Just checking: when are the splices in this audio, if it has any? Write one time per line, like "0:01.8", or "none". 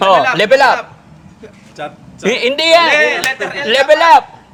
none